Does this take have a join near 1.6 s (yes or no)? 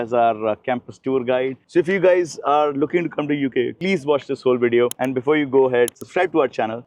yes